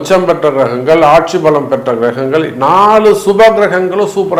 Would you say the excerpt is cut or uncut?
uncut